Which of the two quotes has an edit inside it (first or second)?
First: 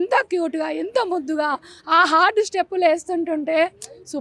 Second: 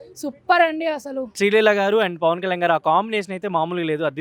second